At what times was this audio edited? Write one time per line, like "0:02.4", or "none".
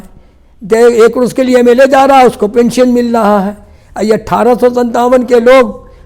none